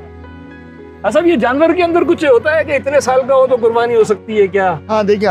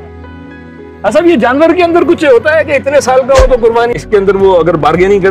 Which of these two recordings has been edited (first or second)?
second